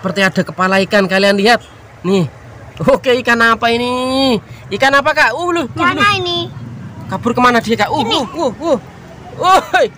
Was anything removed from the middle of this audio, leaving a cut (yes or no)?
no